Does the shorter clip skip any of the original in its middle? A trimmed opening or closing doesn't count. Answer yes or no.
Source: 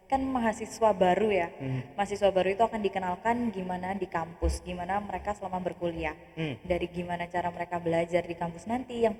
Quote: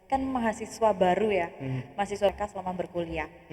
yes